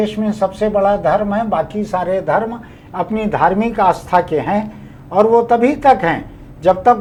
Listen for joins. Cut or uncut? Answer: uncut